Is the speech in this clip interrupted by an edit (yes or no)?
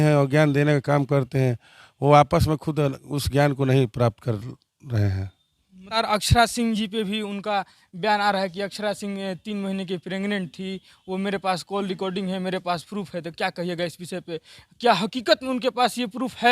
yes